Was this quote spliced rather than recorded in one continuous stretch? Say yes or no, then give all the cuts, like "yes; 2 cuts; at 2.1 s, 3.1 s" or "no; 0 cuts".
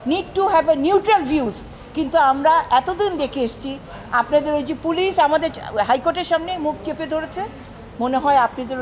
no; 0 cuts